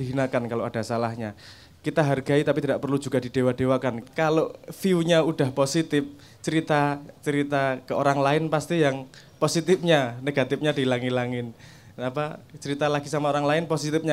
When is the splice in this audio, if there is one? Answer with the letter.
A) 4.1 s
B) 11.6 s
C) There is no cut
A